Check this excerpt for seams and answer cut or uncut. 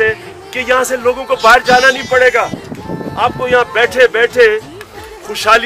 uncut